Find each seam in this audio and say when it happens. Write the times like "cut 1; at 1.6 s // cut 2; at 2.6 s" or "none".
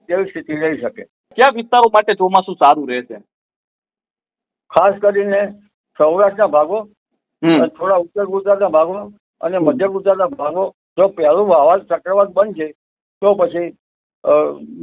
cut 1; at 1.3 s // cut 2; at 10.8 s